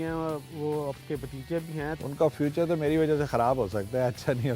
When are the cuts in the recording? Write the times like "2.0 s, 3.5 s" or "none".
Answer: 2.0 s